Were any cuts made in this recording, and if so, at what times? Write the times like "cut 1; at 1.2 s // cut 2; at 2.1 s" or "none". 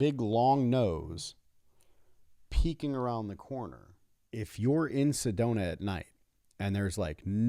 cut 1; at 4.5 s